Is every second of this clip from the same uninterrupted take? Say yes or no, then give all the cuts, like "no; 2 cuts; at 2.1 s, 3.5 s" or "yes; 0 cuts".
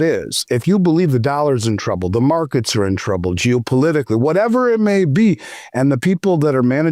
yes; 0 cuts